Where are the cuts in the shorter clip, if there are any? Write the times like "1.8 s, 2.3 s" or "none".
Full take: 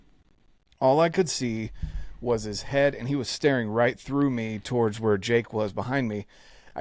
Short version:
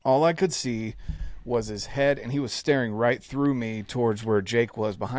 none